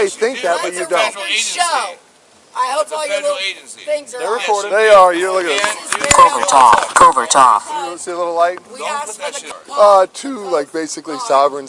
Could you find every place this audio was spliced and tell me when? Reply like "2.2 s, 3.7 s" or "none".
none